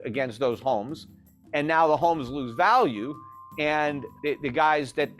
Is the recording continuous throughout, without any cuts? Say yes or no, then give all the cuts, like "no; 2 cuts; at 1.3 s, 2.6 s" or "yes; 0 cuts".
no; 1 cut; at 4.1 s